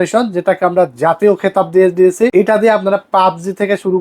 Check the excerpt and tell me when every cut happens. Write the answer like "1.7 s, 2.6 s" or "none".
2.3 s

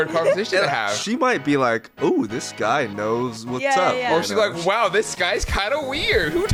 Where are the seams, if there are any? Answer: none

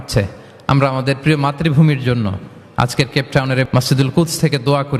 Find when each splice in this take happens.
3.7 s

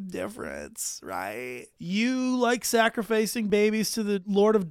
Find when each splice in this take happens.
1.7 s, 3.7 s

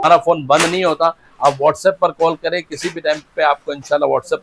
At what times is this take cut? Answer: none

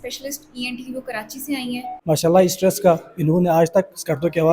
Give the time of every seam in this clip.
1.9 s

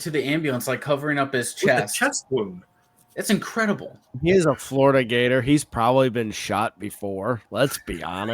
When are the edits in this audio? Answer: 4.1 s

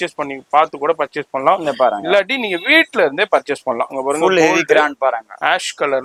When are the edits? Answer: none

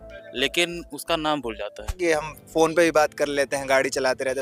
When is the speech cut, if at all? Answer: 1.9 s

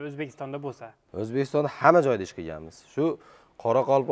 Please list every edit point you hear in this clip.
1.0 s

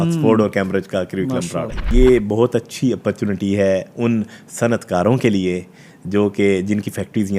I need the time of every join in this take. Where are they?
1.9 s

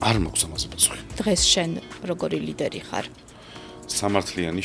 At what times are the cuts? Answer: 1.2 s

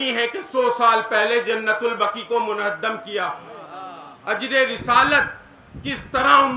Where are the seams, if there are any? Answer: none

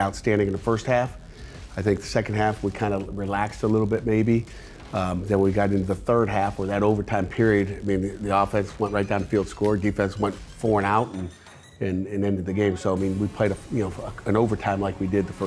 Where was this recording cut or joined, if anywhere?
none

